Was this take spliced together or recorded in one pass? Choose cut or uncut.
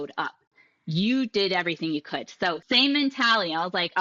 cut